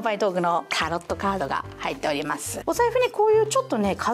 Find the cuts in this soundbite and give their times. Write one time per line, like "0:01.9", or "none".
0:02.6